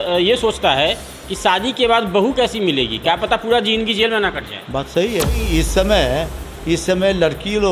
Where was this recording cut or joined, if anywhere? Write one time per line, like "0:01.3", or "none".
0:05.4